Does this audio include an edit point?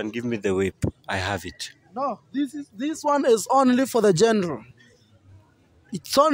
no; 0 cuts

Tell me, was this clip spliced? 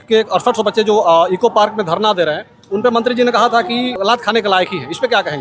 yes; 1 cut; at 4.0 s

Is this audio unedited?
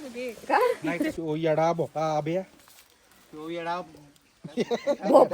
no; 1 cut; at 1.2 s

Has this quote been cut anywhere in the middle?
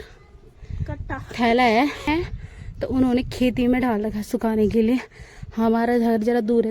yes; 1 cut; at 2.1 s

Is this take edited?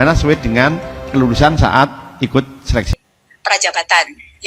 yes; 1 cut; at 2.9 s

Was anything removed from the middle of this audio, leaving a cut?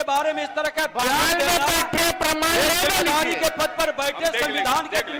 no; 0 cuts

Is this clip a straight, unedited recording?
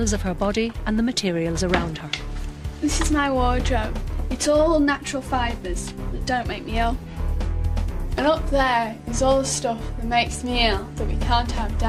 yes; 0 cuts

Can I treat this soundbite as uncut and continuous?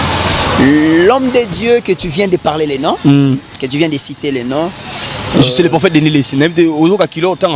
yes; 0 cuts

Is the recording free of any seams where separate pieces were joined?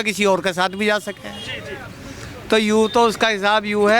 yes; 0 cuts

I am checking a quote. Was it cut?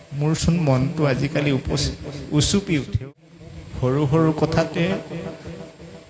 yes; 1 cut; at 3.0 s

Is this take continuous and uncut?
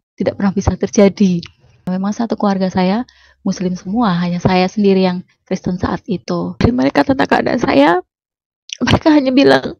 no; 2 cuts; at 1.9 s, 6.6 s

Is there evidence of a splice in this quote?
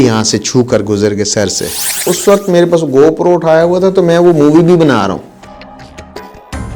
yes; 2 cuts; at 1.9 s, 5.4 s

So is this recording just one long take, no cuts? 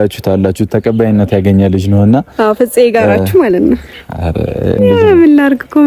no; 1 cut; at 4.8 s

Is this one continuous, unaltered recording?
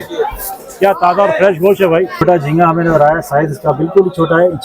no; 1 cut; at 2.2 s

